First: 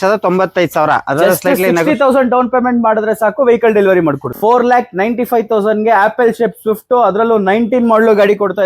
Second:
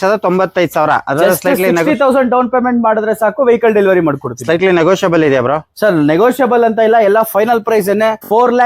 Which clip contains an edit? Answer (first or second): first